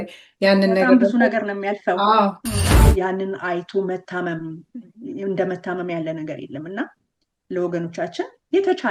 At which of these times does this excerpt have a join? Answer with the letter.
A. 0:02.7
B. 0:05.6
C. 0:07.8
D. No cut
A